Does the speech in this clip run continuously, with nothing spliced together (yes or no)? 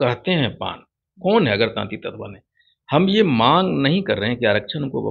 yes